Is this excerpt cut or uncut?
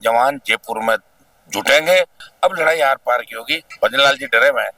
cut